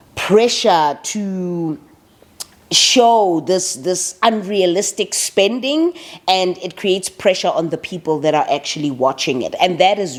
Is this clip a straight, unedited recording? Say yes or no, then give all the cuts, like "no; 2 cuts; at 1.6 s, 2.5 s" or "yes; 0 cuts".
yes; 0 cuts